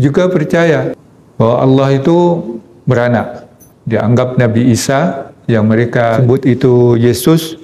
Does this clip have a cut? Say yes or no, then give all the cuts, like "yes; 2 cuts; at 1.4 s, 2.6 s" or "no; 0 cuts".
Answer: yes; 1 cut; at 6.2 s